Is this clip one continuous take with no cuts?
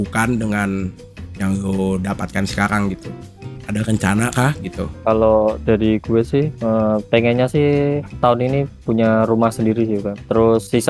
yes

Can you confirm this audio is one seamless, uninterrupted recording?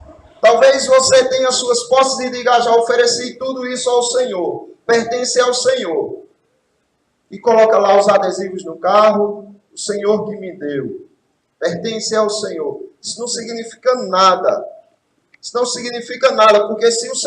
yes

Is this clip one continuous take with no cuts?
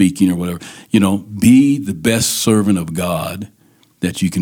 yes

